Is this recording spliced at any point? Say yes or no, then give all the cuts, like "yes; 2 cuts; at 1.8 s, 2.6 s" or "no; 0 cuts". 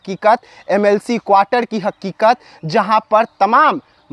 no; 0 cuts